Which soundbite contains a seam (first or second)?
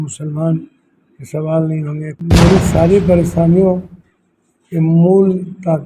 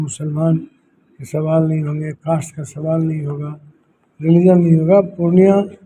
first